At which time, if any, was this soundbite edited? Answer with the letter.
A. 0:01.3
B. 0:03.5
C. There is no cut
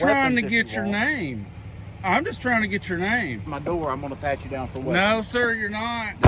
B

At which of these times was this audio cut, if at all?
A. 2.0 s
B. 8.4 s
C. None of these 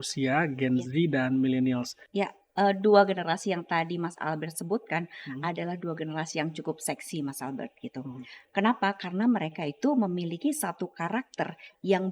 A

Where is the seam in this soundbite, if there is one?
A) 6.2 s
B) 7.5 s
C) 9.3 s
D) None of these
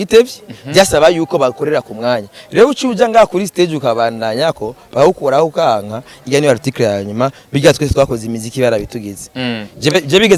D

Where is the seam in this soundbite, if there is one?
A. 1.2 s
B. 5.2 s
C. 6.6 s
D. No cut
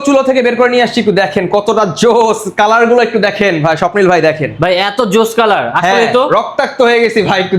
D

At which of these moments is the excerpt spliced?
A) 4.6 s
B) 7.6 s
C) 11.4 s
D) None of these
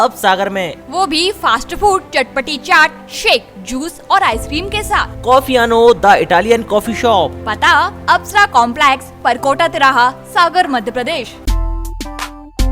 C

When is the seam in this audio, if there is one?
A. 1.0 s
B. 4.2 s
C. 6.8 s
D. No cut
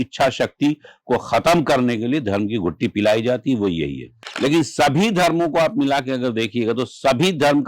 B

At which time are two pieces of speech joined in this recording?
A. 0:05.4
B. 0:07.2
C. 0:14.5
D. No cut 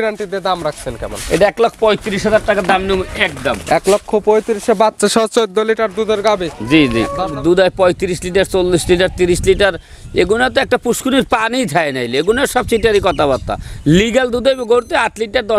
B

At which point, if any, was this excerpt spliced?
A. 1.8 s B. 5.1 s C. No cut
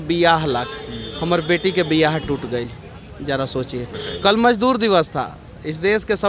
C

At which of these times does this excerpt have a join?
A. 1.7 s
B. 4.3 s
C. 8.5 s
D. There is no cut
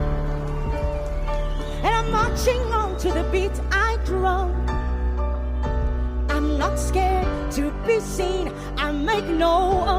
D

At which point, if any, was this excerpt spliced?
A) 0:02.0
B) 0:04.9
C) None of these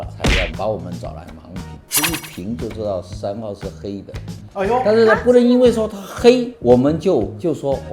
C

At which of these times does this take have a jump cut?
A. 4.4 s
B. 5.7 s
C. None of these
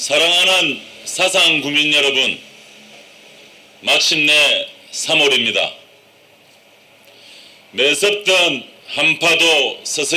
C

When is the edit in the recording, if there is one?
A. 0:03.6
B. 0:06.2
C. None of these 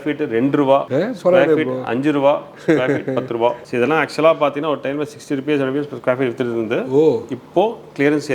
A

